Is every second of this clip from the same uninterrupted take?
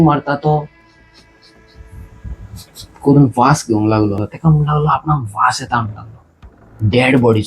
no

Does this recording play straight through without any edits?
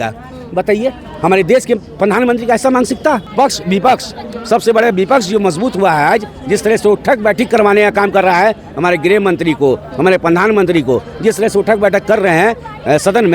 no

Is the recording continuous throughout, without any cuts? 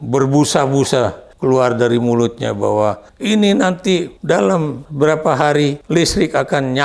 no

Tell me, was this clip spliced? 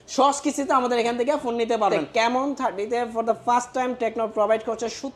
yes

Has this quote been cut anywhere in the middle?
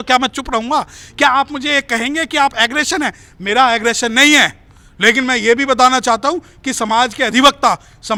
no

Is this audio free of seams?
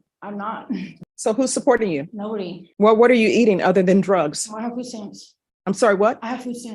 yes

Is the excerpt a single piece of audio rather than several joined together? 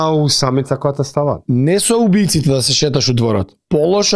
no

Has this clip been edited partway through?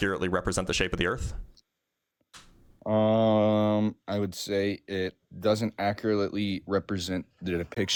no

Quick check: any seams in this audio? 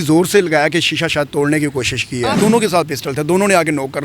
yes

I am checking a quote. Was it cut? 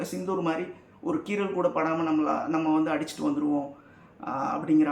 no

